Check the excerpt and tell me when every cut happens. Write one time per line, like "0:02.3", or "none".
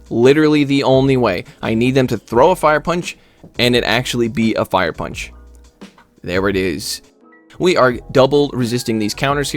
0:07.3